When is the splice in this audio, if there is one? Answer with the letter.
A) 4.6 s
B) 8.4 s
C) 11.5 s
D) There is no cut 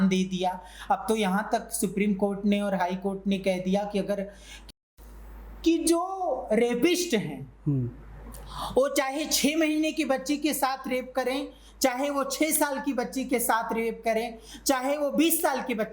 A